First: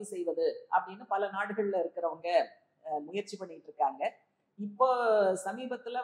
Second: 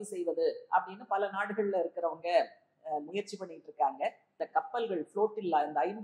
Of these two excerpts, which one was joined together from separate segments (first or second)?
second